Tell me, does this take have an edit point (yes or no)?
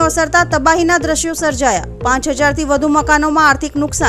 no